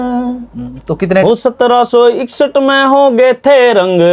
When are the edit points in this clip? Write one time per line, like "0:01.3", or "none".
0:01.2